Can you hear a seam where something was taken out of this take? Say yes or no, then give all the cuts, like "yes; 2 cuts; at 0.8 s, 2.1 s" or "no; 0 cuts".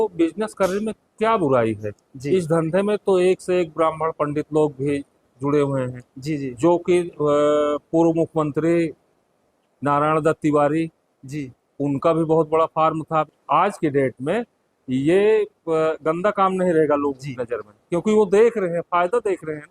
yes; 1 cut; at 13.3 s